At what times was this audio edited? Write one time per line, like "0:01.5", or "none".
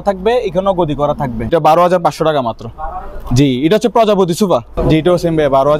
0:01.5
0:04.7